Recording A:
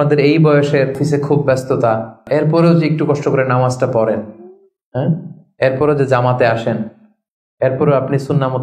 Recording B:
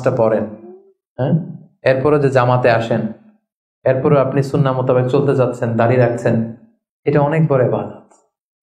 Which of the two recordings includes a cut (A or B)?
A